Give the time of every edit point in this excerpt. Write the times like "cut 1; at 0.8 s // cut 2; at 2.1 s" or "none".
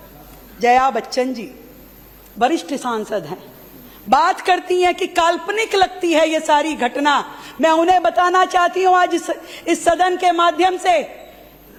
none